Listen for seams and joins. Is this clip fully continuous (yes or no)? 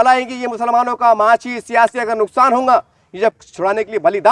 no